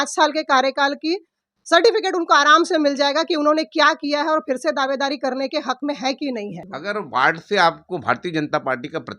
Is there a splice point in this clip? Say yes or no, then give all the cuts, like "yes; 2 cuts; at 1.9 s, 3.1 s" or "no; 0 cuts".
yes; 1 cut; at 6.6 s